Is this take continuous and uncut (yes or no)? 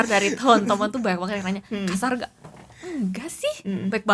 yes